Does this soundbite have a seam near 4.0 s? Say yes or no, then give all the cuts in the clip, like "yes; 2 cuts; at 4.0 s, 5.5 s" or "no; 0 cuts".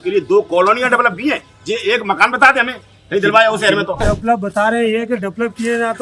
yes; 1 cut; at 4.0 s